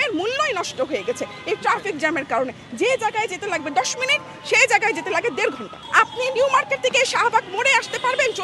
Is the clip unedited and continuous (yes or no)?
yes